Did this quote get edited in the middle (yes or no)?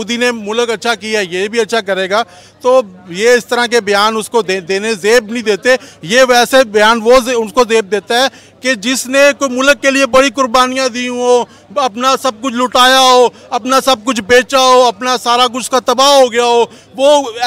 no